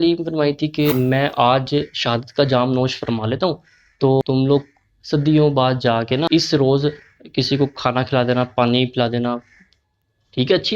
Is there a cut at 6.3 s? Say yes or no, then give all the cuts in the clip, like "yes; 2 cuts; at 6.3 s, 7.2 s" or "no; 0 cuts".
yes; 3 cuts; at 0.9 s, 4.2 s, 6.3 s